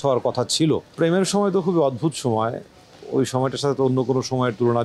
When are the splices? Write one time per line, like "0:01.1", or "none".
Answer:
0:00.9